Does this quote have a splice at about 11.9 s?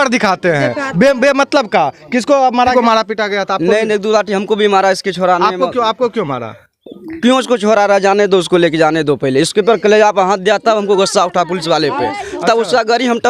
no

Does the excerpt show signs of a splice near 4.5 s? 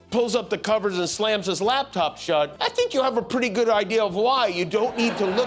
no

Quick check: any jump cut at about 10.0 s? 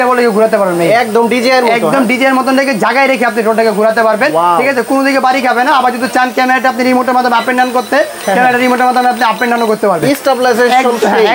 no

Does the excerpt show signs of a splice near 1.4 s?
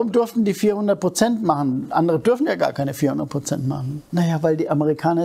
no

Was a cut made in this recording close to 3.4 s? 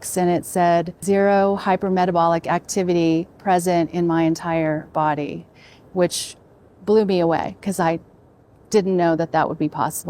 no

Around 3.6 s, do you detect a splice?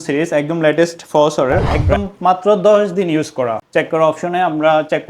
yes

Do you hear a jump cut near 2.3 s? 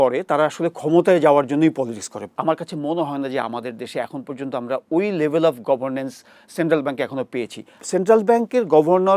yes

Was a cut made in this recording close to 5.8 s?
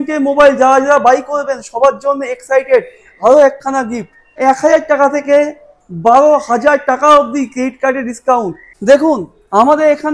no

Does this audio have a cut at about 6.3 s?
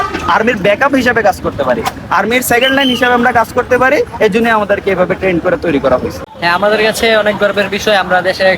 yes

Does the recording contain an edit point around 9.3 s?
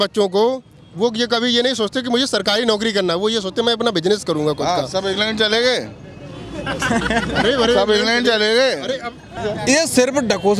yes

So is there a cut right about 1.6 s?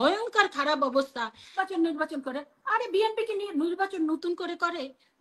yes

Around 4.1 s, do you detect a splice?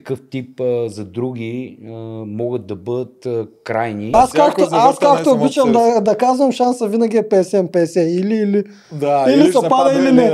yes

